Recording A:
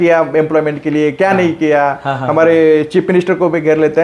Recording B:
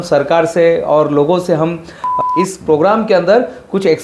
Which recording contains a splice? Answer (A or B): B